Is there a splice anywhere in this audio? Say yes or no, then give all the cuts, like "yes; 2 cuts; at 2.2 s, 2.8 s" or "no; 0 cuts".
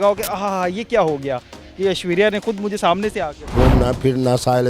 yes; 1 cut; at 3.5 s